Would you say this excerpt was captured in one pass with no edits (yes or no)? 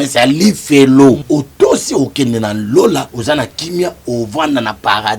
no